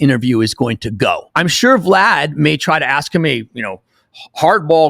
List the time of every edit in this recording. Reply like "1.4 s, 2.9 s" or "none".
1.3 s